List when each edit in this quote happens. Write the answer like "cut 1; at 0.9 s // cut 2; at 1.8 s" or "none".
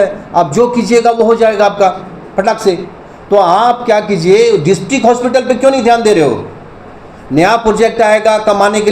none